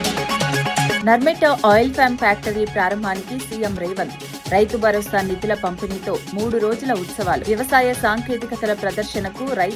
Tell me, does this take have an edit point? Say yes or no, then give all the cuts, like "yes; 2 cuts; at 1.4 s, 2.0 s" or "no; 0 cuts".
yes; 1 cut; at 1.0 s